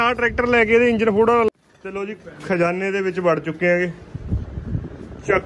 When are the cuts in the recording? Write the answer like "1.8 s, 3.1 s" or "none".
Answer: 1.5 s